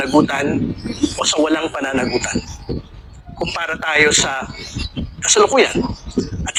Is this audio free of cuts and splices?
yes; 0 cuts

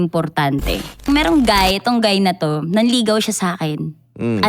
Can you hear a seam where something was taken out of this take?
yes; 1 cut; at 1.1 s

